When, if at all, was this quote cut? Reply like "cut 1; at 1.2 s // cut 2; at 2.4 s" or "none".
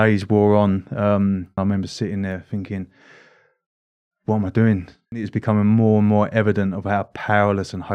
cut 1; at 1.6 s // cut 2; at 5.3 s